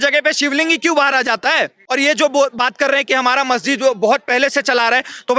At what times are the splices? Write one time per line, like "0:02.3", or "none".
0:01.8